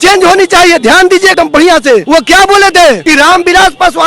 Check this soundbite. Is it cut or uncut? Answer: cut